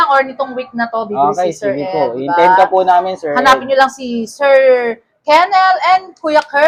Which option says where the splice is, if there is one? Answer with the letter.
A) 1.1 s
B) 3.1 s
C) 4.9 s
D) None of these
D